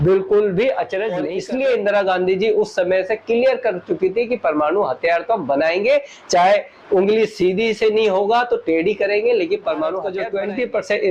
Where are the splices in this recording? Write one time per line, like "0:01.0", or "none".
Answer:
0:01.3
0:10.2